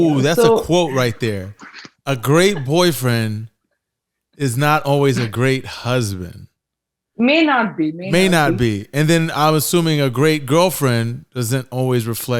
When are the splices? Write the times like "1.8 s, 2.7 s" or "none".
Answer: none